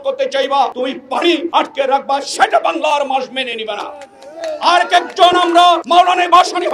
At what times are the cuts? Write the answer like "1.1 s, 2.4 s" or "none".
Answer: 1.3 s, 5.8 s